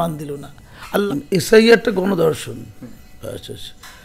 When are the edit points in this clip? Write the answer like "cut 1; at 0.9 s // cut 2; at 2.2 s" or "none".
cut 1; at 1.0 s

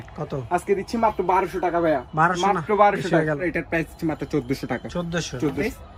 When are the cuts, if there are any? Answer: none

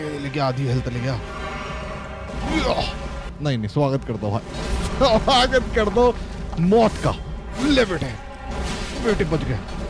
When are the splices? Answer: cut 1; at 3.2 s

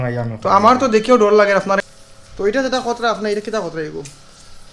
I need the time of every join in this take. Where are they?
cut 1; at 1.9 s

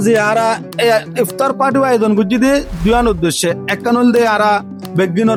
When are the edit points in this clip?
none

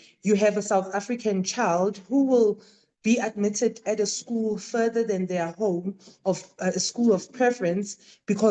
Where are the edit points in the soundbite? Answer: none

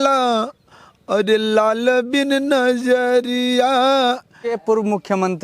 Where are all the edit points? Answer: cut 1; at 4.5 s

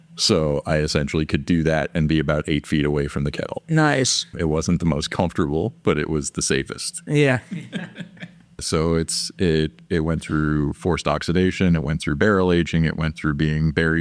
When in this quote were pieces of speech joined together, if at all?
cut 1; at 4.3 s // cut 2; at 8.6 s

